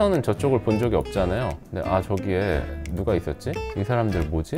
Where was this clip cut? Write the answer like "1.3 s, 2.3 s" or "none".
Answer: 1.6 s